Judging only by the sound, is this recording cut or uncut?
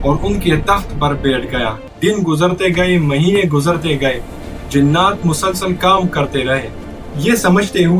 cut